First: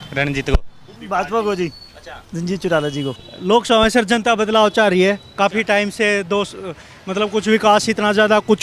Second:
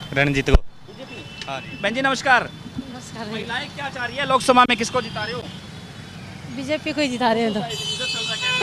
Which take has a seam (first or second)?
first